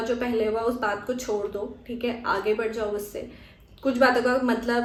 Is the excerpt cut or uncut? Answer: uncut